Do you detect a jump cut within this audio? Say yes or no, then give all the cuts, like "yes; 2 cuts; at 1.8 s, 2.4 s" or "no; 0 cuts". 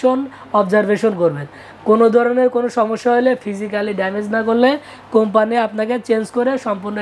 no; 0 cuts